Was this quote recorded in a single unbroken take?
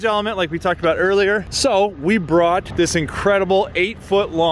yes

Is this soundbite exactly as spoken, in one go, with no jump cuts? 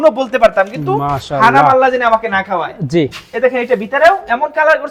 yes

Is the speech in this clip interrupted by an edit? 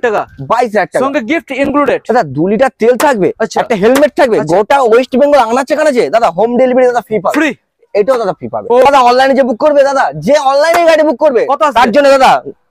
yes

